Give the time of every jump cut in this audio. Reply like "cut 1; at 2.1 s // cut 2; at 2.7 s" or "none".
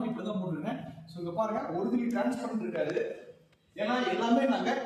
none